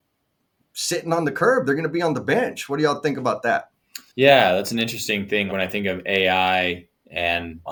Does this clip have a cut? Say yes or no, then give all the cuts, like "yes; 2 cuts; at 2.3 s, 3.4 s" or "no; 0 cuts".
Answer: no; 0 cuts